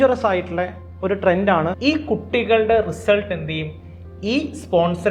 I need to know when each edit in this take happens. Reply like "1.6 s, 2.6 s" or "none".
1.8 s